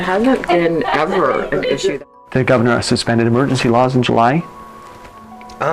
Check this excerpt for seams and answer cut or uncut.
cut